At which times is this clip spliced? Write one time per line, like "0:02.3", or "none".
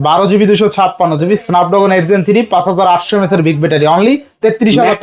none